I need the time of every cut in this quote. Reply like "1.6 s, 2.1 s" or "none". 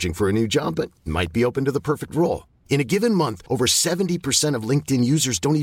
none